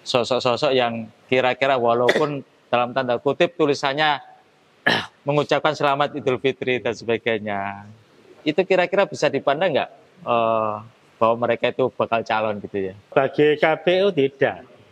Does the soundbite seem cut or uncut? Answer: cut